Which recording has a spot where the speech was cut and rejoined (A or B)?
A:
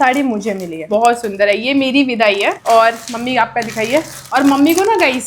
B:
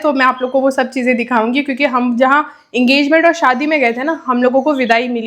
A